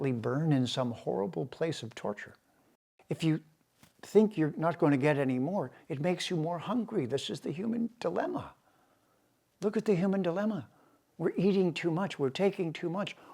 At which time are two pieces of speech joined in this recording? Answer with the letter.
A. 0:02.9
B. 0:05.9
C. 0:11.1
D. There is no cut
A